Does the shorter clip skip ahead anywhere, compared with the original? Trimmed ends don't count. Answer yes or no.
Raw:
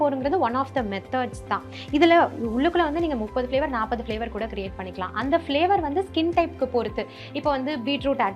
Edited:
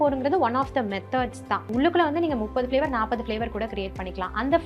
yes